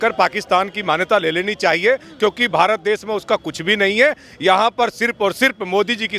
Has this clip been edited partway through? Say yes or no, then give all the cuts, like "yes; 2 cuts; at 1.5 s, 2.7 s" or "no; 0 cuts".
no; 0 cuts